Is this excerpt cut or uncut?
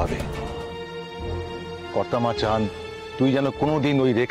cut